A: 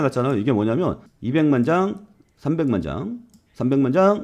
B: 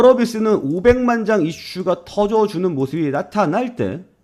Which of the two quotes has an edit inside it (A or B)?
A